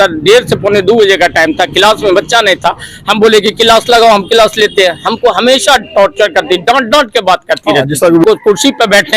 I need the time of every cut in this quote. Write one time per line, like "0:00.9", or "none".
0:08.2